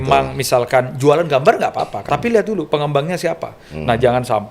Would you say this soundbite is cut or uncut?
cut